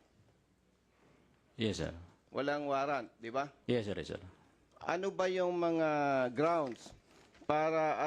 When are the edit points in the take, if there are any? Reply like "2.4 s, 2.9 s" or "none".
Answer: none